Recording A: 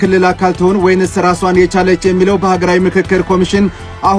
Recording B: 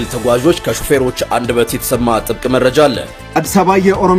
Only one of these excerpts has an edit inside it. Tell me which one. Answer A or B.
B